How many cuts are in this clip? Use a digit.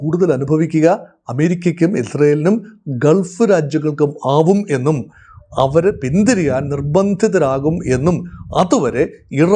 0